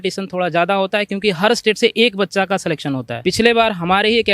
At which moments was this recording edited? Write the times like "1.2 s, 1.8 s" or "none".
3.1 s